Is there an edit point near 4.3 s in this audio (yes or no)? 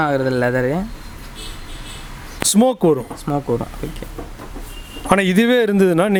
no